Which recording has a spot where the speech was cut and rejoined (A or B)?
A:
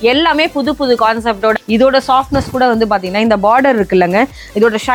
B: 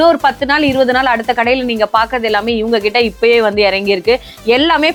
A